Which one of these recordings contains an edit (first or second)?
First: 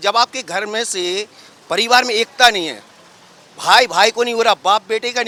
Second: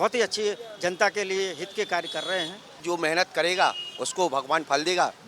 second